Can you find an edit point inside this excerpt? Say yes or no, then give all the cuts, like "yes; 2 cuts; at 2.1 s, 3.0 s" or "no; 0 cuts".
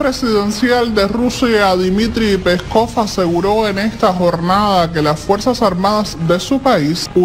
no; 0 cuts